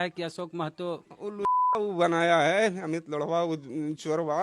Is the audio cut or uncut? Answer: cut